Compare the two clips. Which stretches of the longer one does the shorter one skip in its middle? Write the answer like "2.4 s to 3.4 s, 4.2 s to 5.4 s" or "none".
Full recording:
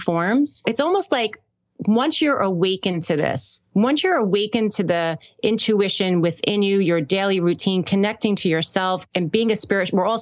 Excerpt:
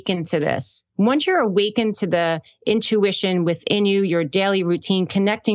none